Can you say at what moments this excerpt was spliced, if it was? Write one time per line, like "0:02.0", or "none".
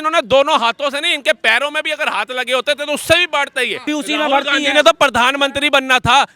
0:03.8